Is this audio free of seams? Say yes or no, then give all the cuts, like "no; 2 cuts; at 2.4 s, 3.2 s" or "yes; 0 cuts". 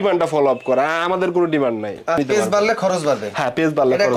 no; 1 cut; at 2.2 s